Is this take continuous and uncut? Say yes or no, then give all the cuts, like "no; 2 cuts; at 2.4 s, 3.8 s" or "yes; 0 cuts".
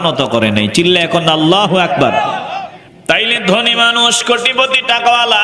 no; 1 cut; at 2.5 s